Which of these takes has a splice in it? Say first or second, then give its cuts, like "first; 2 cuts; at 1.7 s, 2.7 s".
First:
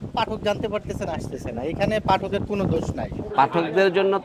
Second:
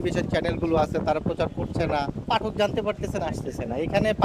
first; 1 cut; at 3.2 s